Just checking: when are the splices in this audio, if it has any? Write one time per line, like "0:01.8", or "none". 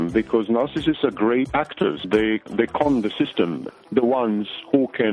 0:02.3
0:03.6